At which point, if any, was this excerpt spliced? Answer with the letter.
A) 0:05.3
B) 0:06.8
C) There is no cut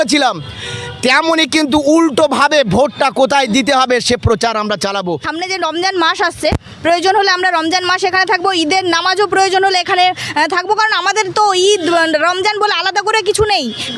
A